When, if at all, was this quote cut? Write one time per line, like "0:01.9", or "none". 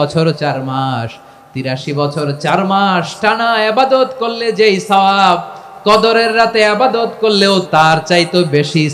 0:07.7